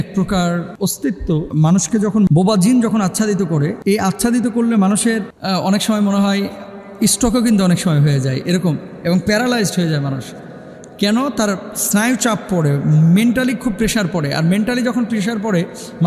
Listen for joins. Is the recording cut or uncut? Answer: cut